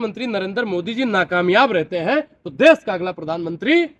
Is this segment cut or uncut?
uncut